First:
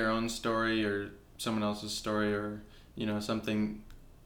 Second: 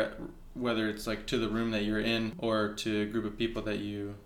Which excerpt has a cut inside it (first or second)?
second